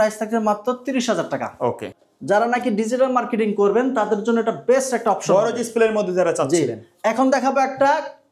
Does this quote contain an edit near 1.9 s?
no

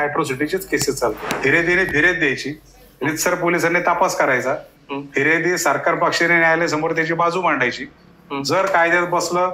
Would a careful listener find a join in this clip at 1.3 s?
yes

